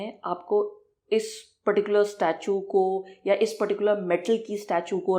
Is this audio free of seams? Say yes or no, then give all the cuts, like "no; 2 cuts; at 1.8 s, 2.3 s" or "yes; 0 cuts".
yes; 0 cuts